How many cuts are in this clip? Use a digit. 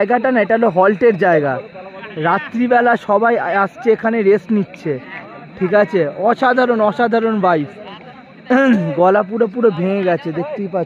0